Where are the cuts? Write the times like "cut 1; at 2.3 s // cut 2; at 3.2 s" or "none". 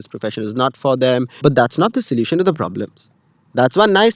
cut 1; at 1.4 s